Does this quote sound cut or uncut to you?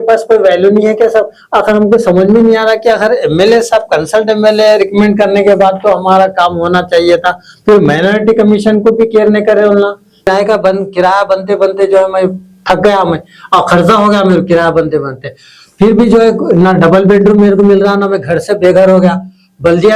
cut